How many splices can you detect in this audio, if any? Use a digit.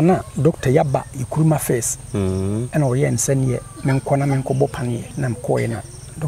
2